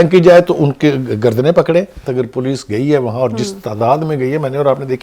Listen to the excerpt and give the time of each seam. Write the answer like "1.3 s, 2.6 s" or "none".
2.0 s